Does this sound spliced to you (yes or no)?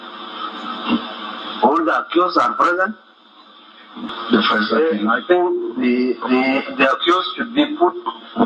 yes